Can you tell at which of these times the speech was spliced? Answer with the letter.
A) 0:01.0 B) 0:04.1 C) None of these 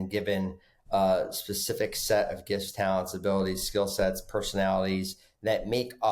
C